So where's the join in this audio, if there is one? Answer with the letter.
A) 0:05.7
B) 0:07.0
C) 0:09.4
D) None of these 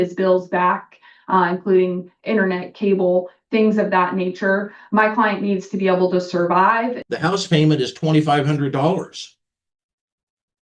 B